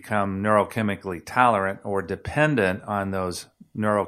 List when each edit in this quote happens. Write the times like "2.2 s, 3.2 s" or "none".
none